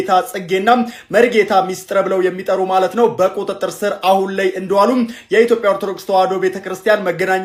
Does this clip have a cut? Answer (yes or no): no